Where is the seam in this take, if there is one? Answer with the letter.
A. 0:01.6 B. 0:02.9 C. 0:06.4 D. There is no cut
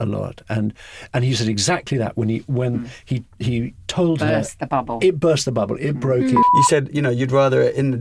C